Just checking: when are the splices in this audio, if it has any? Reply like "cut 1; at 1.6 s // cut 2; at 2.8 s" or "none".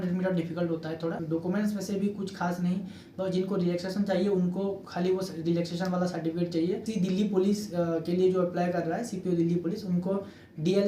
cut 1; at 1.2 s // cut 2; at 6.8 s